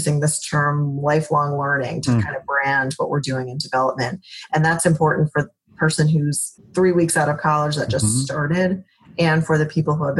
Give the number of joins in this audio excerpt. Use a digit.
1